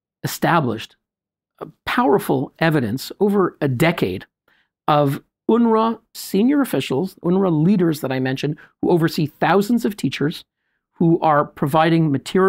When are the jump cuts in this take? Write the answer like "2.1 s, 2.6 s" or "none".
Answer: 6.2 s